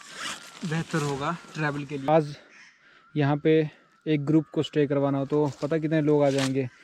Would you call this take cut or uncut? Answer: cut